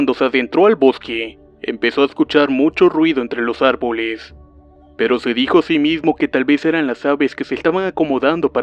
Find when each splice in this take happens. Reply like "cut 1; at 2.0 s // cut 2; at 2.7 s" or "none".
cut 1; at 2.6 s